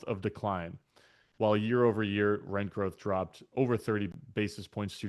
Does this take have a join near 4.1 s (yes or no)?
yes